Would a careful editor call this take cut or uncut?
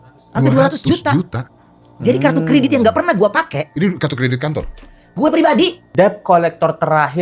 cut